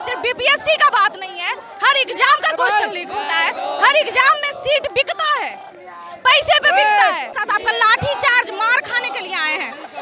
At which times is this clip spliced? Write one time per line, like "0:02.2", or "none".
0:07.3